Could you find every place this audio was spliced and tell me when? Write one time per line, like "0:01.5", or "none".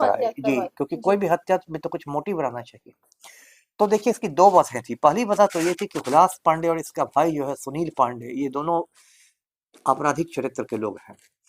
none